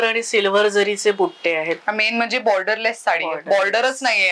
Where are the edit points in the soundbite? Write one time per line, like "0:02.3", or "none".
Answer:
none